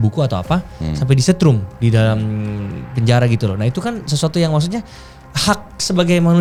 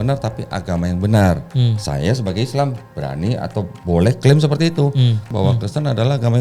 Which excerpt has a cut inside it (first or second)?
second